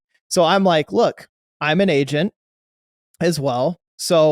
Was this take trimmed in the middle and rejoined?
no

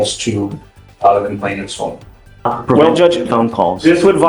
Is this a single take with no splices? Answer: no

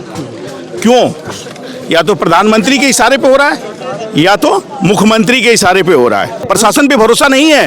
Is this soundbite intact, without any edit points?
no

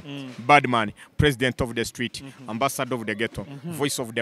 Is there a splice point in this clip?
no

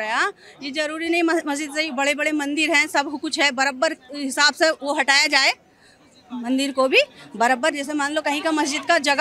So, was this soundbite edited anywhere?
no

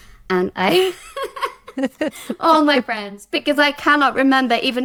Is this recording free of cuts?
yes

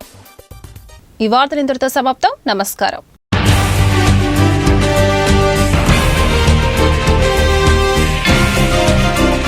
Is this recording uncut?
yes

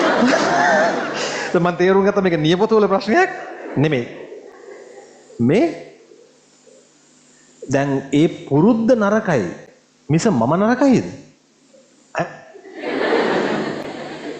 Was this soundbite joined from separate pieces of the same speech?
no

